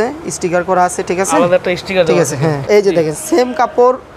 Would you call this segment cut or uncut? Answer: cut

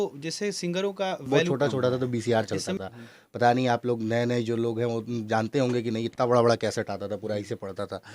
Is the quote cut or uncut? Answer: cut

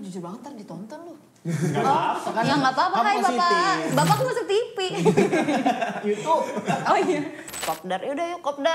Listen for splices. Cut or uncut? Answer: cut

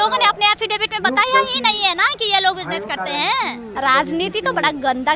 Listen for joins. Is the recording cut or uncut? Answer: cut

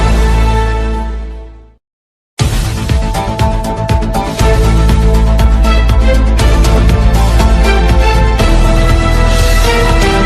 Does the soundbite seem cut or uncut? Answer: uncut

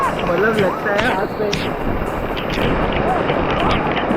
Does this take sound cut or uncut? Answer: uncut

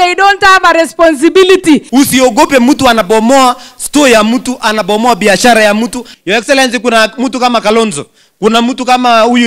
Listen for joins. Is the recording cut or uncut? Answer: cut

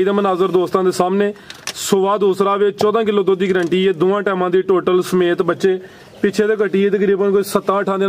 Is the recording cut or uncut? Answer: uncut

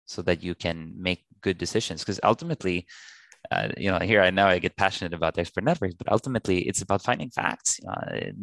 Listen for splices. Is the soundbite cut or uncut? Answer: cut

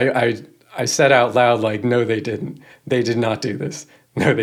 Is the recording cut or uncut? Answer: uncut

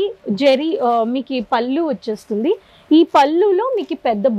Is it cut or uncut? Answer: uncut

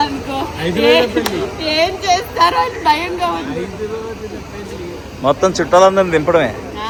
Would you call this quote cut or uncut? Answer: uncut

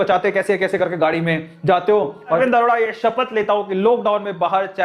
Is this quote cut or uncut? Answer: cut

